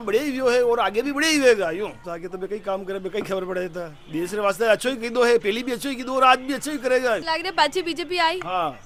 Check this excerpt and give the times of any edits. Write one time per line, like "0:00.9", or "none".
none